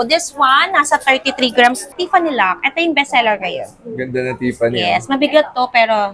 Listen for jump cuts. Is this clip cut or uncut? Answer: cut